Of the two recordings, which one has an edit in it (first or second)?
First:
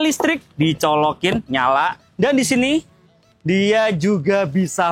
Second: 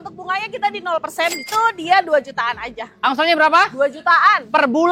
second